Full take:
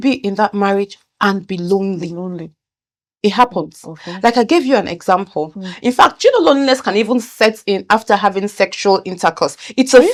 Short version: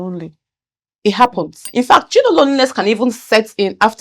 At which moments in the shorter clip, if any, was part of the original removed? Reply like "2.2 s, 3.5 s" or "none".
1.6 s